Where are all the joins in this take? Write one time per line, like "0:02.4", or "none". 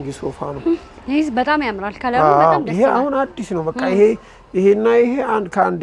none